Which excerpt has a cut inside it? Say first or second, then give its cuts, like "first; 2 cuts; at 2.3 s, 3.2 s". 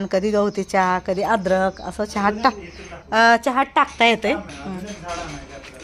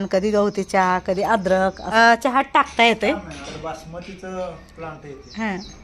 second; 2 cuts; at 1.8 s, 3.3 s